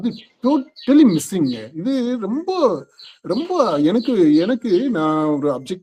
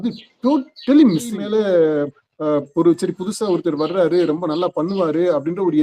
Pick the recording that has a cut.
second; 1 cut; at 1.3 s

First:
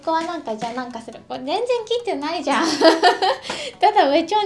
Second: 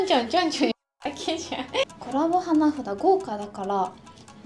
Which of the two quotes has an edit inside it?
second; 1 cut; at 1.8 s

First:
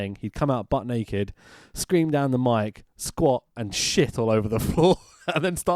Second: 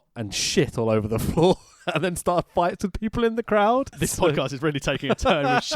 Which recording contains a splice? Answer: second; 1 cut; at 4.0 s

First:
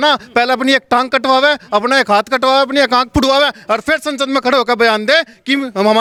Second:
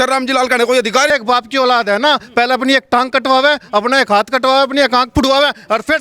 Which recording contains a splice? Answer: second; 1 cut; at 1.1 s

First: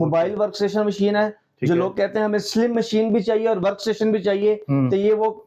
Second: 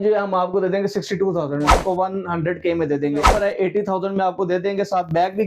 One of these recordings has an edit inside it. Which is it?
second; 2 cuts; at 1.7 s, 3.2 s

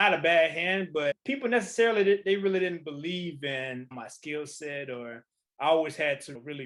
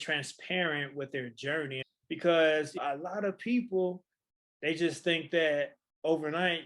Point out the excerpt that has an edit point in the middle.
second; 1 cut; at 1.8 s

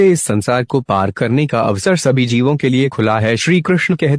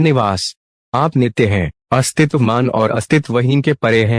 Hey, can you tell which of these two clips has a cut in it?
first; 1 cut; at 3.2 s

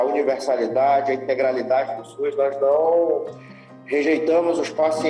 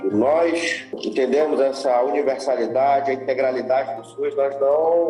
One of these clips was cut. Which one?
second; 1 cut; at 1.0 s

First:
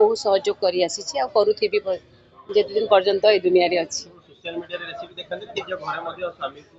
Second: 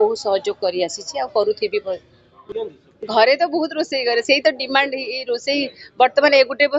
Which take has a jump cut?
second; 1 cut; at 2.5 s

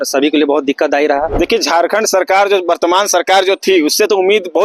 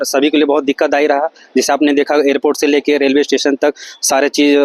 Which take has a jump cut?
first; 1 cut; at 1.3 s

